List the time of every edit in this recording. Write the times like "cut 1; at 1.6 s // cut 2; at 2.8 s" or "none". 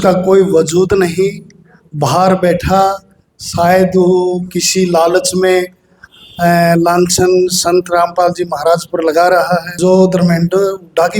cut 1; at 9.7 s